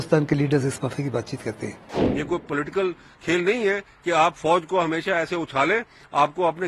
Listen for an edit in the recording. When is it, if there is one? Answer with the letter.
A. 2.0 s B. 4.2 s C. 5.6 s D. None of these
A